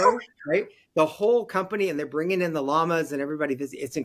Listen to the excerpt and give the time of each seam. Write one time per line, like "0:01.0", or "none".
none